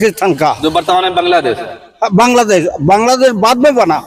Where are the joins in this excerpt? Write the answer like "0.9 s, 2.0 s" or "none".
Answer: none